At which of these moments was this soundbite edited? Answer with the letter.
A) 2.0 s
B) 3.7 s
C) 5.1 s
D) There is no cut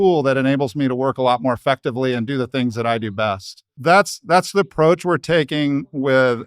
B